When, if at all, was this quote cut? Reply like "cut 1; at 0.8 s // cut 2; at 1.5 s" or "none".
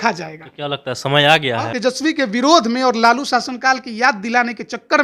cut 1; at 1.7 s